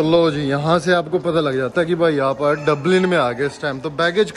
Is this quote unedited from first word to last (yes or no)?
yes